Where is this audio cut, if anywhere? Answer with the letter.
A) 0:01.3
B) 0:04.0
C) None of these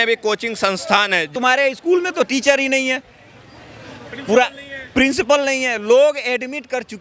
A